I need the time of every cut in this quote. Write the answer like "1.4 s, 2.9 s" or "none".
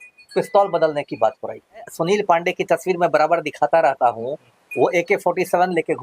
1.9 s